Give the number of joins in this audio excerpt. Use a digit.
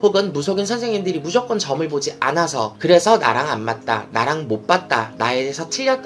0